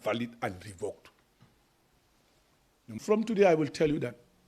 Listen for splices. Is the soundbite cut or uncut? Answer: cut